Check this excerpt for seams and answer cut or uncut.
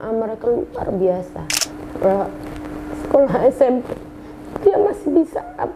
cut